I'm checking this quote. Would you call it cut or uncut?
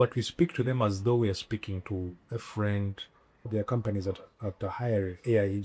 cut